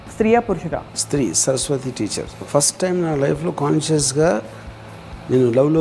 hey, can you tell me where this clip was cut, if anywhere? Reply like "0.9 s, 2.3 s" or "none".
0.9 s, 2.4 s